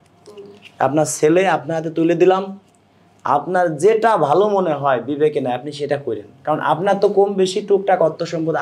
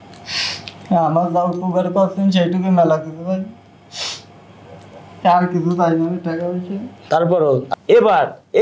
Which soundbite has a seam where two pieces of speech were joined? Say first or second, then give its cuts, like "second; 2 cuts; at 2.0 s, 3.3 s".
second; 1 cut; at 7.7 s